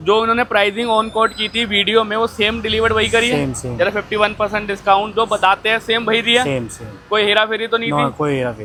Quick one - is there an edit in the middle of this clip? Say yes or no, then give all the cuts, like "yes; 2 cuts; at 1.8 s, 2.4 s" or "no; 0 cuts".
no; 0 cuts